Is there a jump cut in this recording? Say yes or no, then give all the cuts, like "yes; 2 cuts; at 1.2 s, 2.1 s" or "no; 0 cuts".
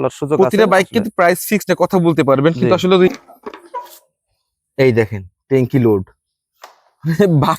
yes; 1 cut; at 3.1 s